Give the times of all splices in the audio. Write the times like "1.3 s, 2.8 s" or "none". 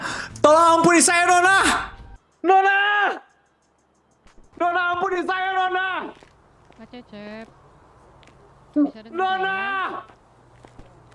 none